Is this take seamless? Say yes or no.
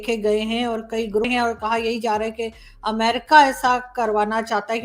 no